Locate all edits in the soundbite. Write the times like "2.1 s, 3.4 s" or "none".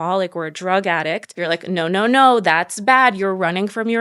1.3 s

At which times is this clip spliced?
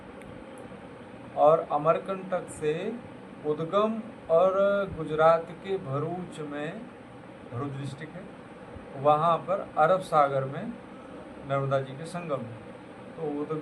none

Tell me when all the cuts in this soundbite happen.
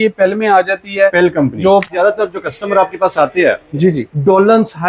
1.9 s

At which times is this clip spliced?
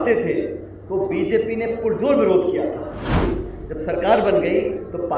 3.2 s

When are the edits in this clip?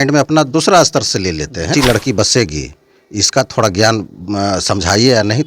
1.7 s

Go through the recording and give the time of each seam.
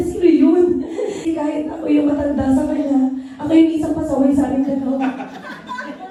none

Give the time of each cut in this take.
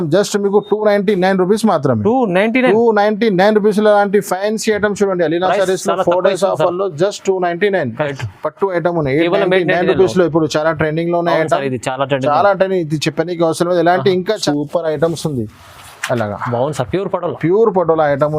8.1 s, 14.4 s

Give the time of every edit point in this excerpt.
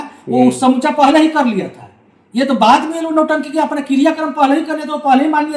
none

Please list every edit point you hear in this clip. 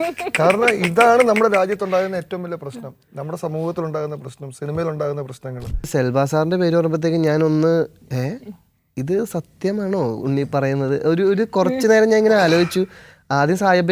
5.9 s

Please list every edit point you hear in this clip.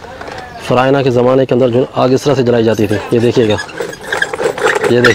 none

